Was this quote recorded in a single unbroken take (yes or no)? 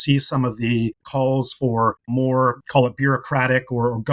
no